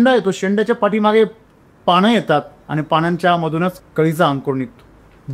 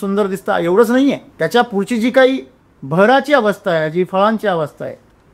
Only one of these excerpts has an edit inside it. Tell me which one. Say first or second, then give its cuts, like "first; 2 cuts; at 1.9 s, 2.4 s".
second; 1 cut; at 1.3 s